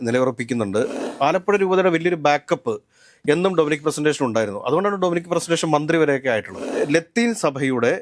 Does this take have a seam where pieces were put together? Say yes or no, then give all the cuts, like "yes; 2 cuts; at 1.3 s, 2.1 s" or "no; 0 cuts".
yes; 2 cuts; at 1.0 s, 6.6 s